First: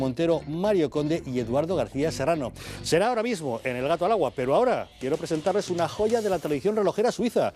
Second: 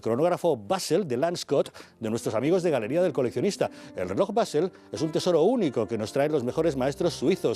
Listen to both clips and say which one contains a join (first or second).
second